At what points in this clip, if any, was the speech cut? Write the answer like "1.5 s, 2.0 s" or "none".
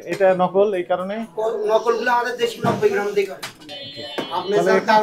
3.7 s